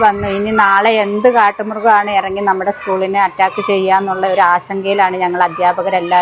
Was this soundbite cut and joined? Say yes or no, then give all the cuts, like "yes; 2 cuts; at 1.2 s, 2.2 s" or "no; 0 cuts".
no; 0 cuts